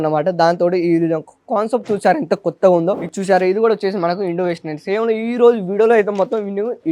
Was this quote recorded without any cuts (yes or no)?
no